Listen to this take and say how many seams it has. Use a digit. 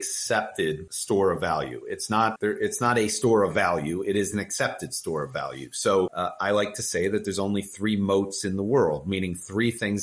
3